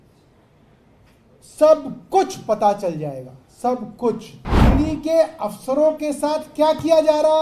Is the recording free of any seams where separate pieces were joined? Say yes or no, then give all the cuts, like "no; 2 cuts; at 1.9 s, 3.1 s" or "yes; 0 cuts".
no; 1 cut; at 4.3 s